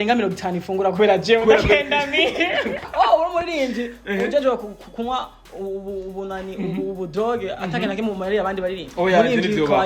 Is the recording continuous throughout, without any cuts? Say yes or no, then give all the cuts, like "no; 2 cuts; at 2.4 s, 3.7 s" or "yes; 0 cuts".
no; 1 cut; at 2.9 s